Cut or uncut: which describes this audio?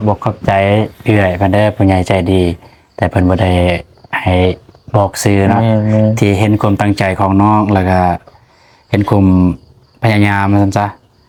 uncut